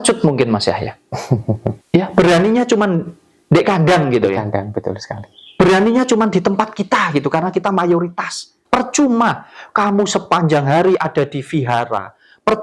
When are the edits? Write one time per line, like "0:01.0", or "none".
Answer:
0:01.8
0:08.6